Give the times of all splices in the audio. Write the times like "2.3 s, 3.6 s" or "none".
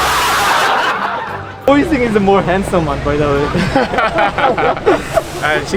1.5 s